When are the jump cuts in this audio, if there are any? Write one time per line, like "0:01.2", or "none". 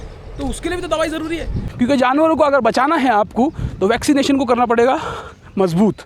0:01.6